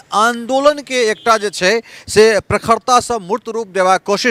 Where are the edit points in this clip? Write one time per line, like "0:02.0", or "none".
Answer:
none